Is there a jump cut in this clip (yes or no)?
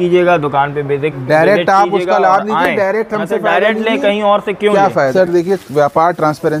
yes